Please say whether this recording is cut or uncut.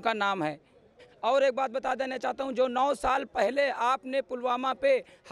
cut